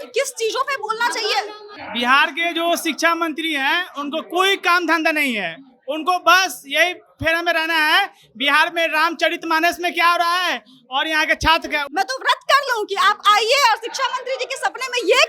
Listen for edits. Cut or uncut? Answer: cut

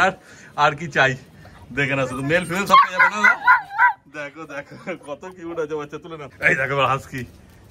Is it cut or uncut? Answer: uncut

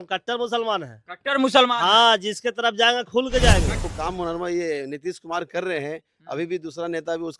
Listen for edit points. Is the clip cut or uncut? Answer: cut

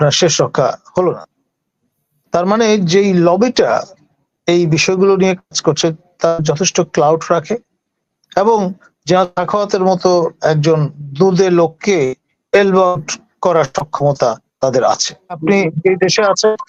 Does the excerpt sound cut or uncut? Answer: cut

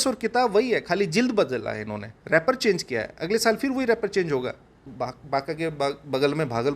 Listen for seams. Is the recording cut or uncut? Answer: cut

